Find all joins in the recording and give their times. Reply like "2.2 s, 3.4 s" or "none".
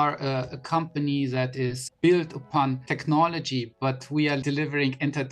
1.8 s, 2.9 s, 4.4 s